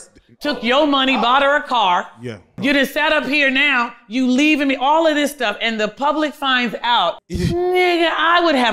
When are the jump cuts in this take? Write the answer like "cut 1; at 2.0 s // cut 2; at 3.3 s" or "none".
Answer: cut 1; at 2.6 s // cut 2; at 7.3 s